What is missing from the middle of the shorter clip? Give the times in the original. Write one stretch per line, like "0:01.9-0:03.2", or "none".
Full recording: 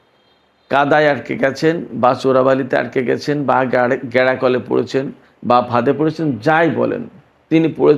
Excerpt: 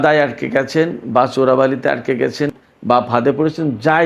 0:03.4-0:05.1